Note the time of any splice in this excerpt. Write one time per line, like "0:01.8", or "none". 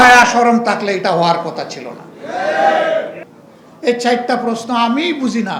0:03.2